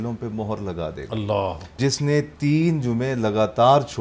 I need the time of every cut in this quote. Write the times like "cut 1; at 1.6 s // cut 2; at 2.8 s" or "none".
cut 1; at 1.8 s